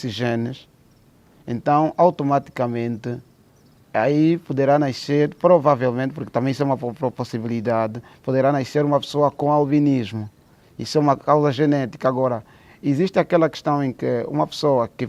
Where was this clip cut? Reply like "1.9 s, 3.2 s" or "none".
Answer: none